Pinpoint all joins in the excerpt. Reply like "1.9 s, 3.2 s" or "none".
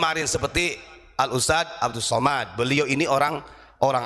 none

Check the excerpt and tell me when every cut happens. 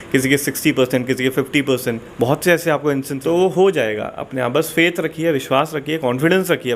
3.1 s

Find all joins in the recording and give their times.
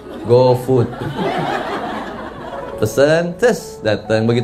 2.7 s

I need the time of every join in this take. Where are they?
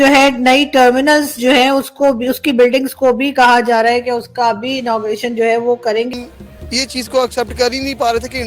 6.1 s

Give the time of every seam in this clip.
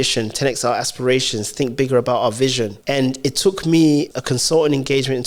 2.8 s, 4.1 s

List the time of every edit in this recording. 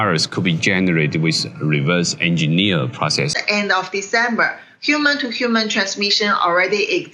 3.4 s

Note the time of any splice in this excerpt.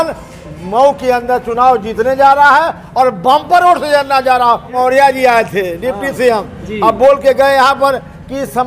4.7 s

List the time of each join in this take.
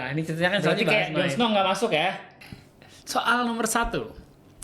2.3 s

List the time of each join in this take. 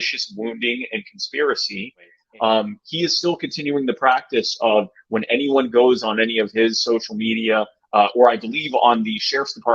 2.2 s

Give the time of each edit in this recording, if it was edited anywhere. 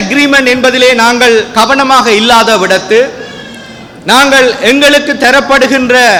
none

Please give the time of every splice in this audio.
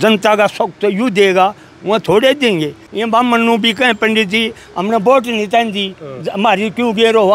2.8 s

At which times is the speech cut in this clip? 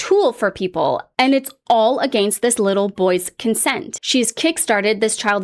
3.9 s

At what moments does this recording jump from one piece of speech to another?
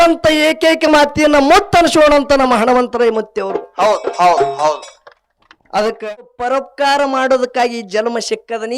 6.3 s

